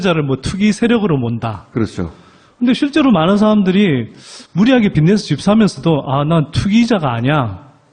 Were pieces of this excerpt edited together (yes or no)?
yes